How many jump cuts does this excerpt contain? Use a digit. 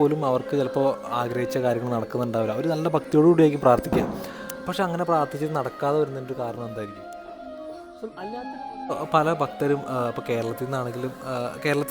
1